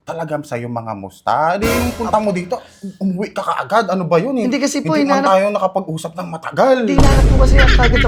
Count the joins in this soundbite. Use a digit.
0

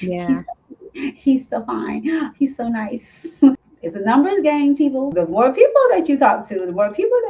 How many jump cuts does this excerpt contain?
2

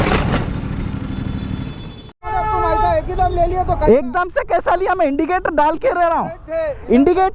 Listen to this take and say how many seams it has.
1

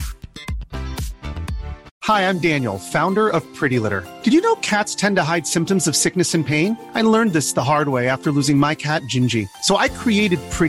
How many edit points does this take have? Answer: 1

